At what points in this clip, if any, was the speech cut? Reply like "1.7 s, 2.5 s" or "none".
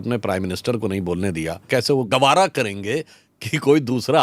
2.0 s